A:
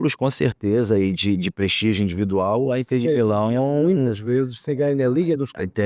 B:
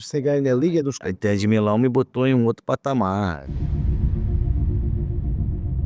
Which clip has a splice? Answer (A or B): B